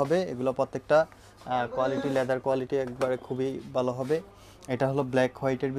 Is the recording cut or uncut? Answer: uncut